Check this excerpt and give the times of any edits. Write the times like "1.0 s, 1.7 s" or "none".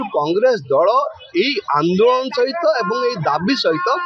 none